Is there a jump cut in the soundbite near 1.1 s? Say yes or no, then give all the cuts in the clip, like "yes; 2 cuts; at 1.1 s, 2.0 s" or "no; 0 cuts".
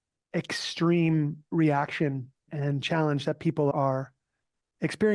no; 2 cuts; at 2.5 s, 3.7 s